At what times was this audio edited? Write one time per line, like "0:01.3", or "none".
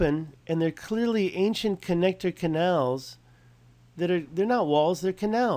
none